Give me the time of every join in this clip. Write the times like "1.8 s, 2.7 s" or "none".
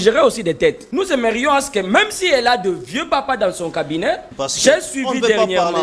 0.8 s, 4.3 s